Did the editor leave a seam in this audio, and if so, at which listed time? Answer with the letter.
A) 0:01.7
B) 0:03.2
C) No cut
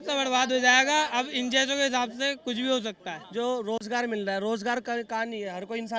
B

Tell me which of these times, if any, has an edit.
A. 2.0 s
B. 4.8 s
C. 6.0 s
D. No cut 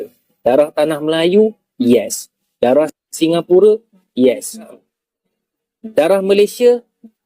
B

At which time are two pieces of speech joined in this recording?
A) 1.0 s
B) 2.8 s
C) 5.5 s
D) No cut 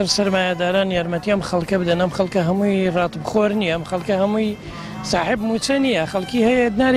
D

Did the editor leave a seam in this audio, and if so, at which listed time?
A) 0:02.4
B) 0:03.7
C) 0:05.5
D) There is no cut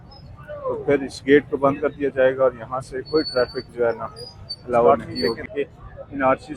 C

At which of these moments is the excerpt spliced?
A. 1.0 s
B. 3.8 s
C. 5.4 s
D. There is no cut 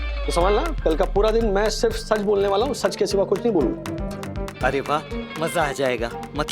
B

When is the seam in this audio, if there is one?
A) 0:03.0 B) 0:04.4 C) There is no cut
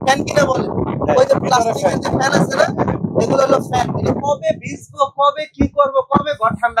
C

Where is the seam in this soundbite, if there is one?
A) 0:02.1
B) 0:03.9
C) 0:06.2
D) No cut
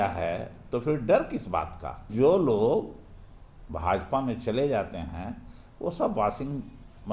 A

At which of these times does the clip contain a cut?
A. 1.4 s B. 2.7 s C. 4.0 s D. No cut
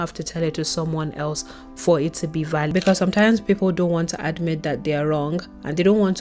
B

